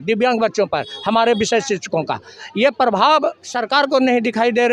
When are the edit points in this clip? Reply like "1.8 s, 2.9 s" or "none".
3.5 s